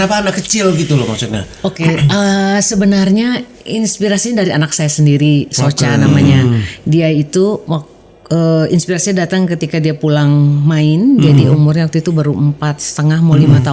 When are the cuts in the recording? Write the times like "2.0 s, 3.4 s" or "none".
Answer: none